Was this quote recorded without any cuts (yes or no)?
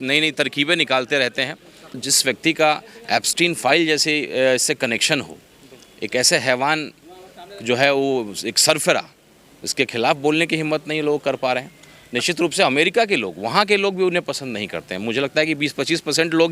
no